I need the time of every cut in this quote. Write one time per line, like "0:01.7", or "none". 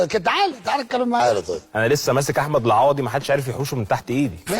0:01.2